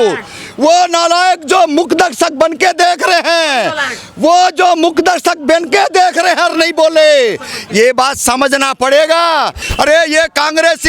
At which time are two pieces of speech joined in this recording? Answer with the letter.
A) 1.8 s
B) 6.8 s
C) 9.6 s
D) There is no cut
C